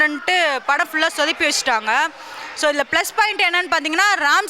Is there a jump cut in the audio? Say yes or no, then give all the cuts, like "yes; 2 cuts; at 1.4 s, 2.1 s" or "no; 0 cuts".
no; 0 cuts